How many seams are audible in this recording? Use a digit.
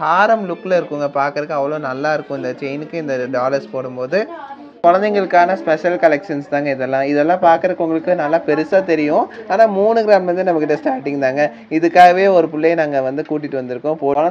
0